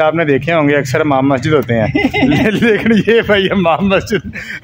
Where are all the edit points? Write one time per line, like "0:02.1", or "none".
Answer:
none